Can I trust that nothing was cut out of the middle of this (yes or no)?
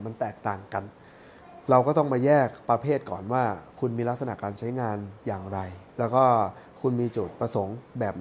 no